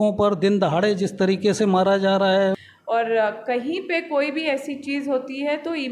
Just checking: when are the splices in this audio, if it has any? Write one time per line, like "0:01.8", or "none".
0:02.7